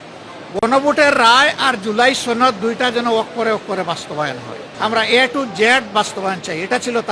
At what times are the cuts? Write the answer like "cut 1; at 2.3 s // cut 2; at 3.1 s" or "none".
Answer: cut 1; at 4.6 s